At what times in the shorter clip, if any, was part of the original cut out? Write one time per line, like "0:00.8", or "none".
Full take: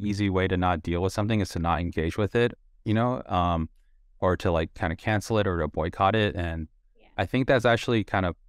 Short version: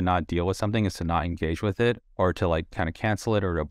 0:02.1